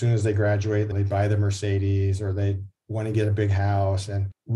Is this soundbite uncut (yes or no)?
no